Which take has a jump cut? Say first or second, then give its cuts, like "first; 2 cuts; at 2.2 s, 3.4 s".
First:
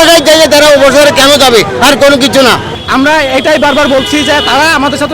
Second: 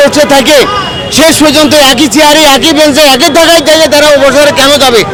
first; 1 cut; at 2.7 s